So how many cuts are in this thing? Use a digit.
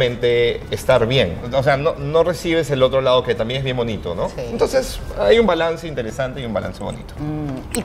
0